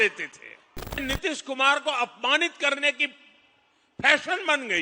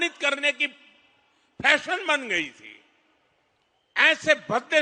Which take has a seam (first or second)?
first